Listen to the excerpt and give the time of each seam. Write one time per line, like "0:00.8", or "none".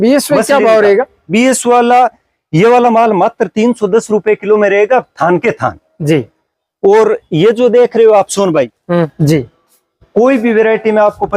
0:09.1